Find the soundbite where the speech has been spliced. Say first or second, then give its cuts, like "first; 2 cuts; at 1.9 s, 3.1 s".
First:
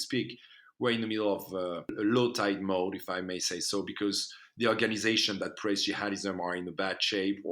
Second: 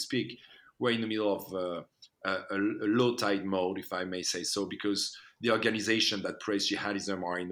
first; 1 cut; at 1.9 s